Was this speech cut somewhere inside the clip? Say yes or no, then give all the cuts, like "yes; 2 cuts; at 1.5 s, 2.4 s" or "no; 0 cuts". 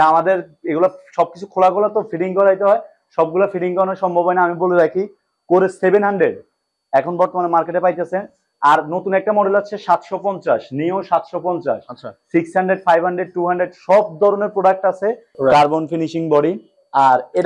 yes; 1 cut; at 15.3 s